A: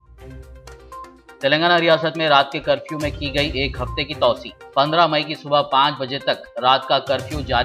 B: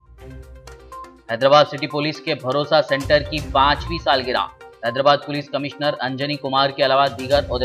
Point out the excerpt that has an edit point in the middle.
A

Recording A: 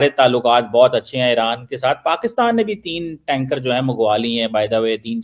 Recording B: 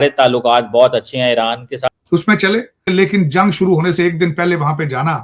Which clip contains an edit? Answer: B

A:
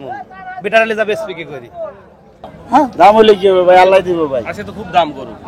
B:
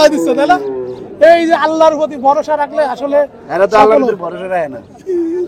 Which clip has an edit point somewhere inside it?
A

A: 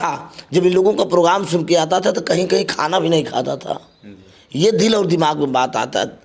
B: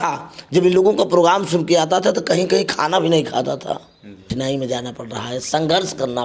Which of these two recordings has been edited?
B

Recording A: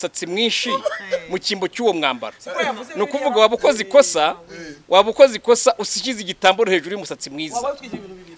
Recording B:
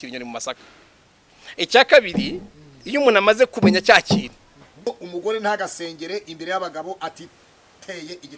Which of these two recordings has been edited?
B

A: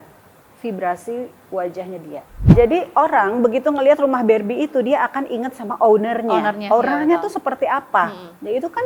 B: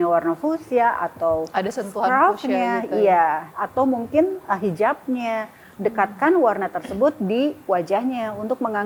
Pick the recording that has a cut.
A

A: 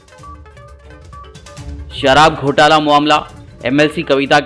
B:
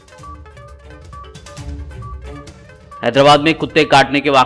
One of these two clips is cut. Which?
A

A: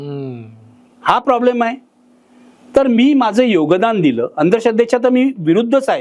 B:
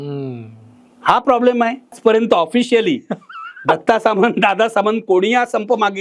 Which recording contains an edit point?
B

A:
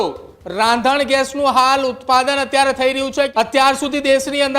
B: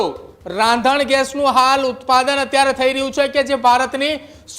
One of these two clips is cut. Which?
A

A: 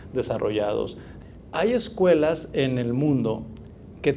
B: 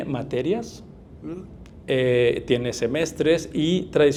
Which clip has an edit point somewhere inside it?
A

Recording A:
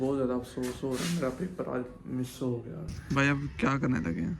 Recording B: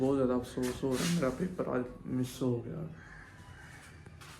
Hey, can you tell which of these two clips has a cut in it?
A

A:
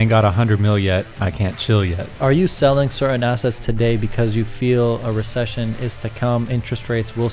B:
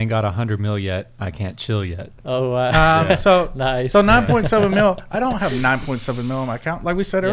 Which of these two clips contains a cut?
A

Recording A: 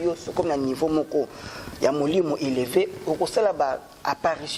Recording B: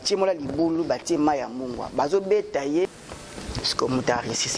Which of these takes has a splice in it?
B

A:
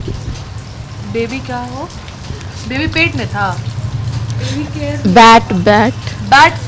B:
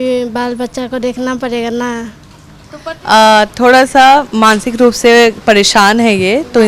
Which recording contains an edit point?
B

